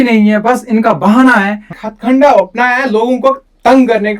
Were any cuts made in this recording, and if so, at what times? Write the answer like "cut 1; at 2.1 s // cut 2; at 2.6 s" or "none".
cut 1; at 1.8 s